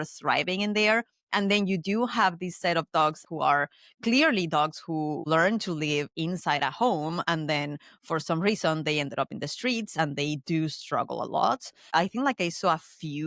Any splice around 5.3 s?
yes; 3 cuts; at 3.2 s, 5.3 s, 11.8 s

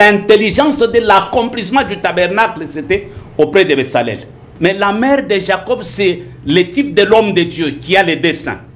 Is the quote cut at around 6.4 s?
no; 1 cut; at 4.5 s

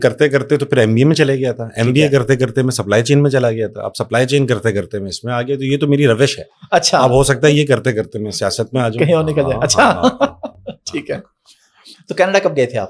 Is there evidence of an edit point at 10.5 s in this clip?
no; 0 cuts

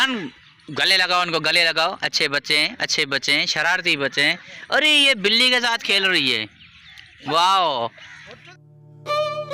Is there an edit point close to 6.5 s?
no; 0 cuts

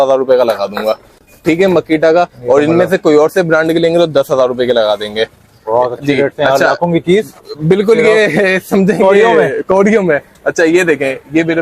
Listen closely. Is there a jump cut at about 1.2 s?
no; 0 cuts

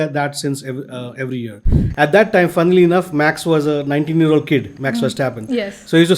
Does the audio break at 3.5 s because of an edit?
no; 1 cut; at 1.8 s

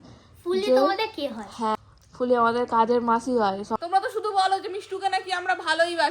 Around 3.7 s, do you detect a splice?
yes; 2 cuts; at 1.8 s, 3.7 s

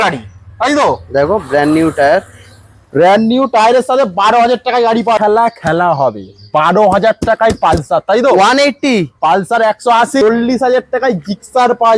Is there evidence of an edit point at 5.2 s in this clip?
yes; 2 cuts; at 5.2 s, 10.2 s

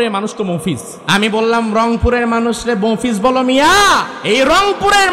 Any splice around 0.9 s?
yes; 2 cuts; at 0.9 s, 4.1 s

